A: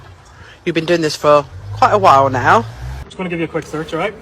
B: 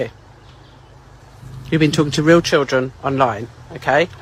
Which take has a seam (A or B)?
A